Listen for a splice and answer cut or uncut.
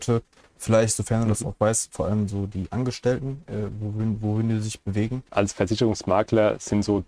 cut